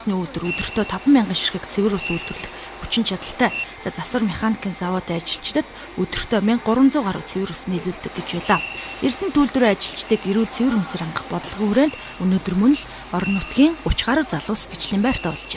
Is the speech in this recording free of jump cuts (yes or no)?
yes